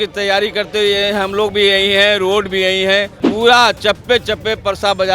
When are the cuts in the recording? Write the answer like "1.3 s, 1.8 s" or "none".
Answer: 3.2 s